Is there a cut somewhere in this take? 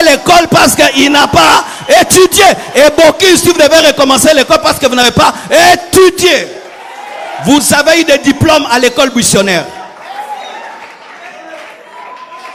no; 0 cuts

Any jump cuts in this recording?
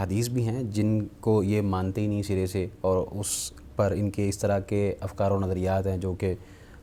no; 0 cuts

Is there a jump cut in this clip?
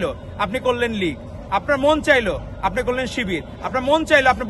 no; 0 cuts

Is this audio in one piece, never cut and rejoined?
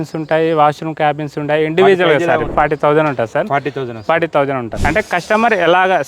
no; 2 cuts; at 2.5 s, 4.8 s

